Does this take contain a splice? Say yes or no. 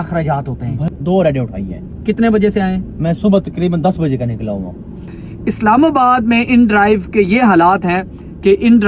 yes